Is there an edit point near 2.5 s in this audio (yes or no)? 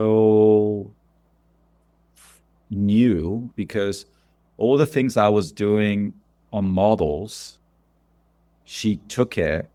no